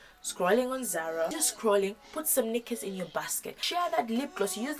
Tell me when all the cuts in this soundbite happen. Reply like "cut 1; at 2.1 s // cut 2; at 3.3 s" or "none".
cut 1; at 1.5 s // cut 2; at 3.6 s